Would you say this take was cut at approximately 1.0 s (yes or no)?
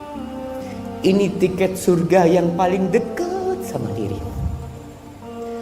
yes